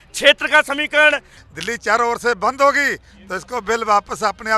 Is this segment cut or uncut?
cut